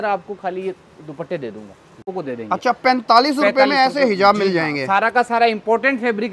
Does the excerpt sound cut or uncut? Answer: cut